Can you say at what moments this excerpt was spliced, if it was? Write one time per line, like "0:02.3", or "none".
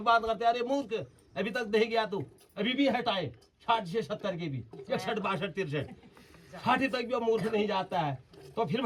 none